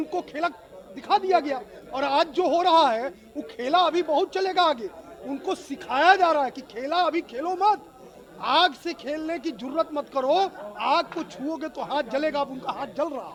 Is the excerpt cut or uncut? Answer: uncut